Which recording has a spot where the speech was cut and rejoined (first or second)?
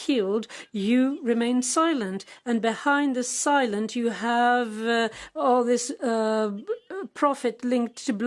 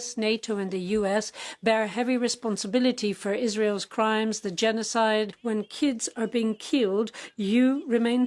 second